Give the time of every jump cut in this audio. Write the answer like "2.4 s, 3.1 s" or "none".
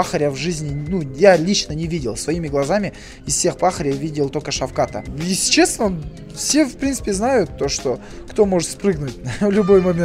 5.1 s